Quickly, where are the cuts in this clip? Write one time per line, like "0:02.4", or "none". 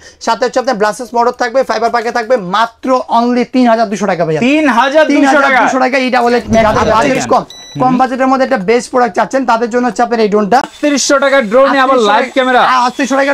0:06.6
0:10.7